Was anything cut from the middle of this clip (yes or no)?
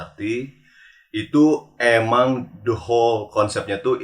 no